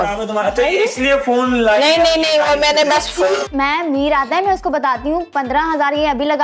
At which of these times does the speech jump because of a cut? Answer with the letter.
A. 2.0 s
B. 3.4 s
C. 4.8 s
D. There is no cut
B